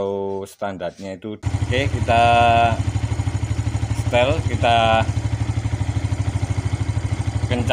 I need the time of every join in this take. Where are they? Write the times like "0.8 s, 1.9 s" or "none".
1.4 s